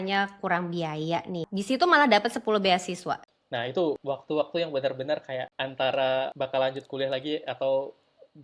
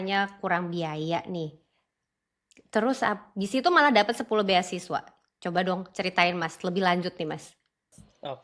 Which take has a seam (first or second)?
first